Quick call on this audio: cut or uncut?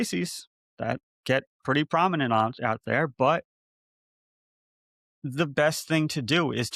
uncut